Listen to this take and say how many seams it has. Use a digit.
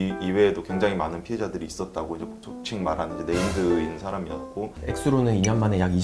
1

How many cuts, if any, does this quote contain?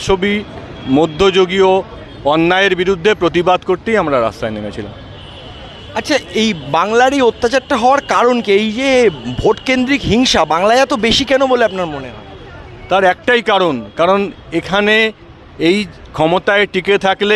0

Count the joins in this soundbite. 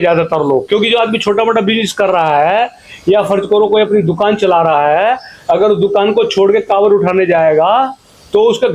0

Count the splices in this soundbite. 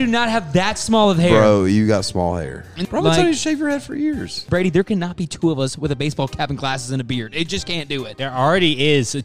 3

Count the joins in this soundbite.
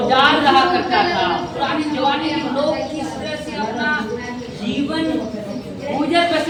0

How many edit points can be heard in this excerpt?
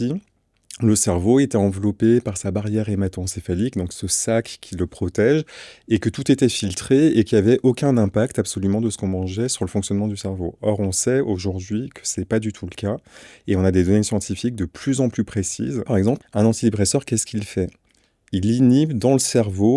1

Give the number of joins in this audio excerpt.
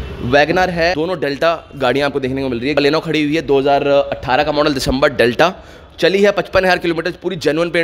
2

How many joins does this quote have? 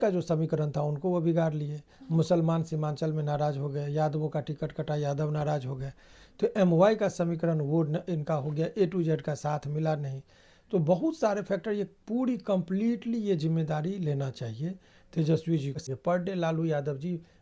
1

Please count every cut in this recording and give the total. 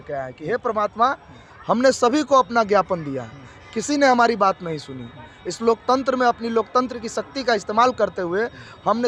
0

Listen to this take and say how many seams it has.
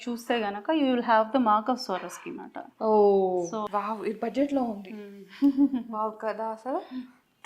1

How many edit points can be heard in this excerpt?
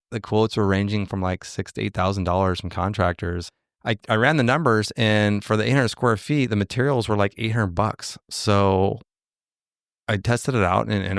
1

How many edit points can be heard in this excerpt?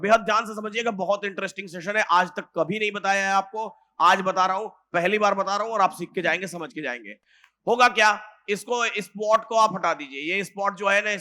0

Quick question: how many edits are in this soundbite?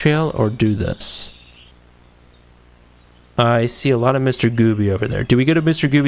1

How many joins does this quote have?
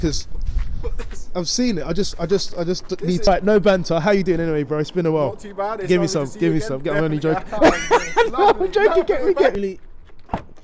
2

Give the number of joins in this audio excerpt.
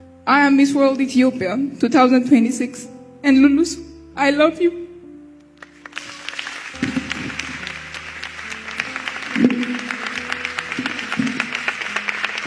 0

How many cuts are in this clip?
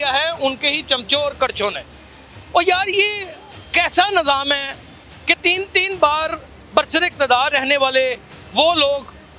0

